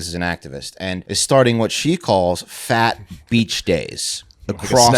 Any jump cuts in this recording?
yes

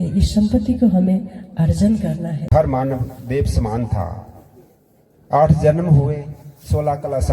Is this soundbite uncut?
no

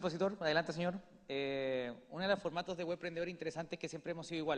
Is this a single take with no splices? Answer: yes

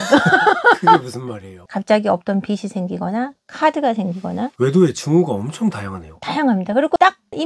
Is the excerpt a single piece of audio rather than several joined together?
no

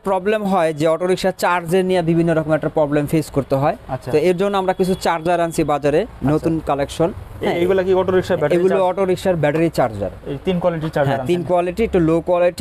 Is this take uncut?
yes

